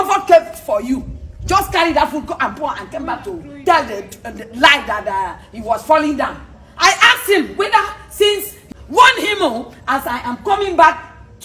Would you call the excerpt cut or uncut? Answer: cut